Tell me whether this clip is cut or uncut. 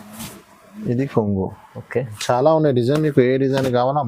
cut